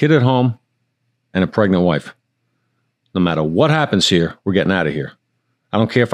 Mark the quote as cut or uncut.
uncut